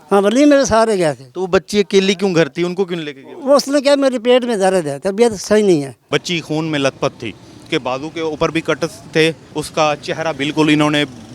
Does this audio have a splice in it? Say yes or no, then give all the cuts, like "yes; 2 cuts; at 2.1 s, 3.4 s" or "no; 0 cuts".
yes; 3 cuts; at 6.1 s, 7.6 s, 9.4 s